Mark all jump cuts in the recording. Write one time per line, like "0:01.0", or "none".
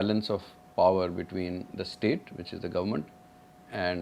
none